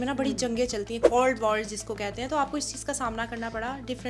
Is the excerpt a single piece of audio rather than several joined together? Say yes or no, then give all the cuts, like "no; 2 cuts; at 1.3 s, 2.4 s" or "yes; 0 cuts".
yes; 0 cuts